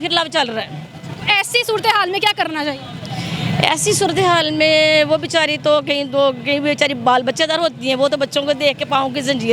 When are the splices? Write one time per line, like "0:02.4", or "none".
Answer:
none